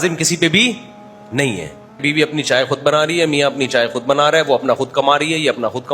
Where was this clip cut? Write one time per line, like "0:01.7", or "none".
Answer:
0:02.0